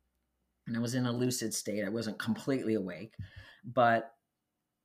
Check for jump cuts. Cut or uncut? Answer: uncut